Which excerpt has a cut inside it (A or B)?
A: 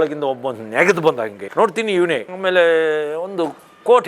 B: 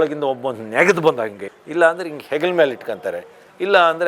B